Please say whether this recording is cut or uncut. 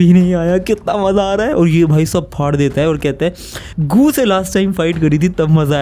uncut